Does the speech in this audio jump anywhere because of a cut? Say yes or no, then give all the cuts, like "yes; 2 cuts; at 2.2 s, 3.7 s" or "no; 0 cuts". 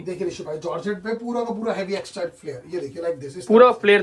no; 0 cuts